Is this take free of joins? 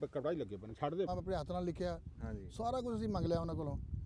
no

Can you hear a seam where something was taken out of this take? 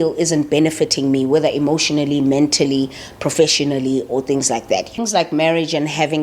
yes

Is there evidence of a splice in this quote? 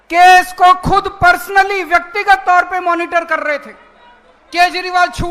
no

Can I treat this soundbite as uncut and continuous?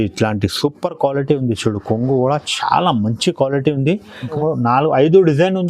no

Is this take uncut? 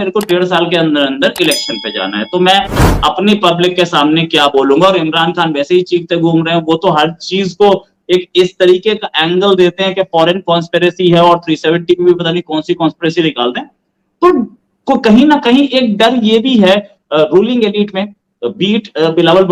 yes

